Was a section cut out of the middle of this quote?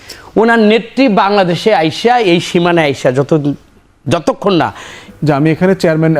yes; 1 cut; at 5.1 s

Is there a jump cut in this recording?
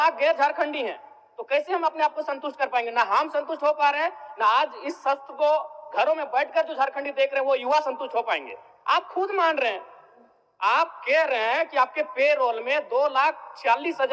no; 0 cuts

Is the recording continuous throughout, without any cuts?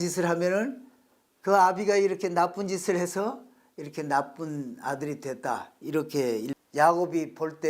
no; 1 cut; at 6.5 s

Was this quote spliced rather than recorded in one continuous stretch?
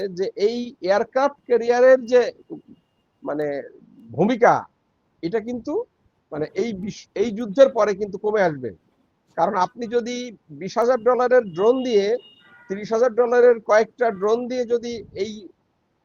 no; 0 cuts

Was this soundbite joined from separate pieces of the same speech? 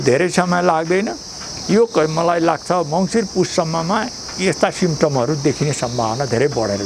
no; 0 cuts

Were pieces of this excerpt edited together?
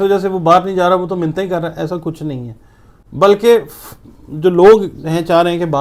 no; 0 cuts

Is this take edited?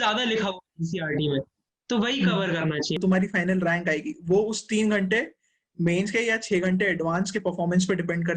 yes; 1 cut; at 3.0 s

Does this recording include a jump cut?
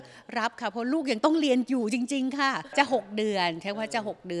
yes; 1 cut; at 2.6 s

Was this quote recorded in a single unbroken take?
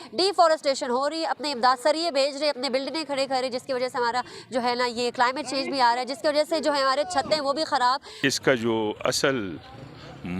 no; 1 cut; at 8.1 s

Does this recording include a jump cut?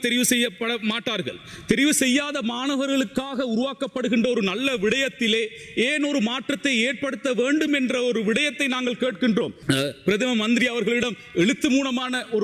yes; 1 cut; at 9.6 s

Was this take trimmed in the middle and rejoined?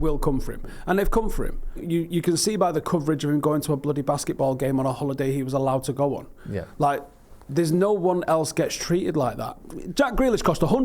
yes; 1 cut; at 1.8 s

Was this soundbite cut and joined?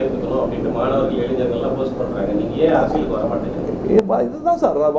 no; 0 cuts

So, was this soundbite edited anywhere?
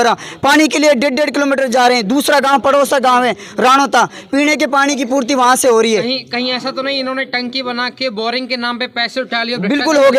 no; 0 cuts

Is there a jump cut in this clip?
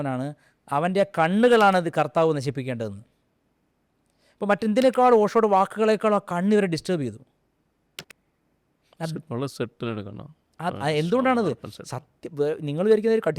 no; 0 cuts

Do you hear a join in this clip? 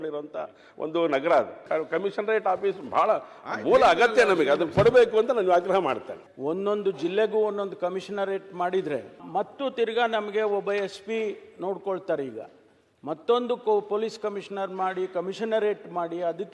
yes; 2 cuts; at 1.6 s, 6.2 s

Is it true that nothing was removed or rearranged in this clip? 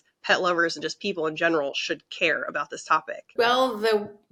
yes; 0 cuts

